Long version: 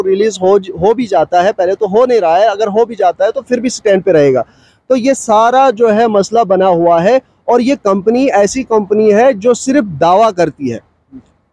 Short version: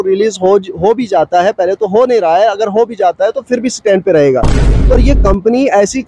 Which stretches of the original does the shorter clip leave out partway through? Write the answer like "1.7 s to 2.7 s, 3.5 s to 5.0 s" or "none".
5.0 s to 7.6 s